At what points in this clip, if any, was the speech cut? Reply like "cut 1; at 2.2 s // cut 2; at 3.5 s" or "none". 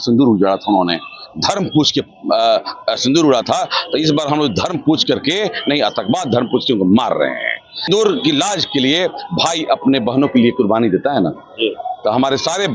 cut 1; at 7.7 s

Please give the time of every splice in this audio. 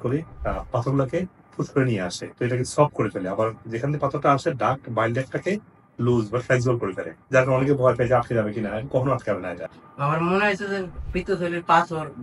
cut 1; at 9.7 s

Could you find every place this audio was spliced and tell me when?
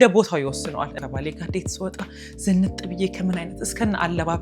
cut 1; at 0.9 s

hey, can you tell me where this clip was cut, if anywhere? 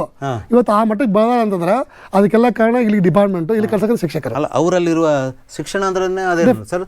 none

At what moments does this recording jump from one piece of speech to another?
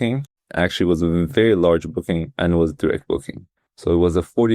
none

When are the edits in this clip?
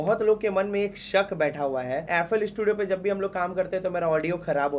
cut 1; at 2.0 s

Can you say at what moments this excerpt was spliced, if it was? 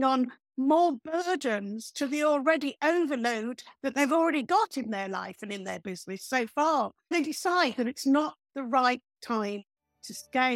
cut 1; at 7.1 s

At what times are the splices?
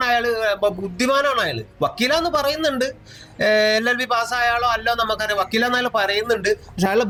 none

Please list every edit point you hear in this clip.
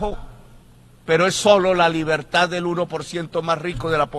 none

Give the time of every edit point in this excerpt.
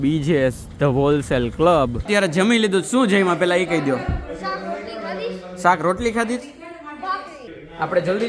cut 1; at 2.1 s // cut 2; at 7.4 s

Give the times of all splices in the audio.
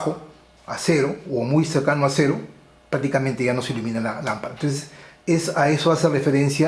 none

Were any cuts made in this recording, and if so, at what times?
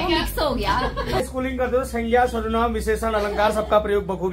cut 1; at 1.2 s

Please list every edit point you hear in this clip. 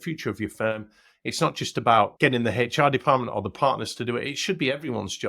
cut 1; at 2.1 s

